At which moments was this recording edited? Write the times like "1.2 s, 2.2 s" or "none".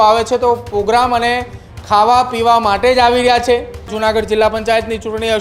3.9 s